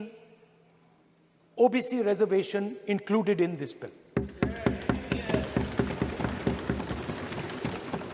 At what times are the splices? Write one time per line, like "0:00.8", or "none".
none